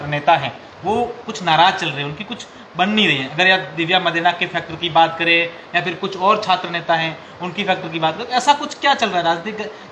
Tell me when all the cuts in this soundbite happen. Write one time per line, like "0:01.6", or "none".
none